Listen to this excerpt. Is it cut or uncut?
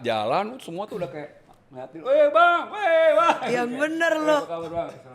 uncut